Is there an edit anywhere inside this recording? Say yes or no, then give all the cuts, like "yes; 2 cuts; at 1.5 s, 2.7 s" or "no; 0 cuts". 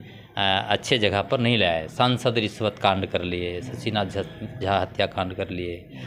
no; 0 cuts